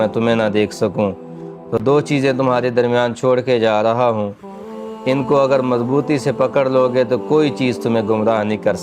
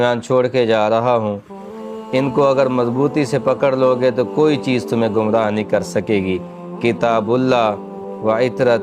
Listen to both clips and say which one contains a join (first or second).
first